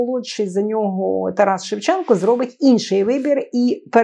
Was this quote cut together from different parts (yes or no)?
no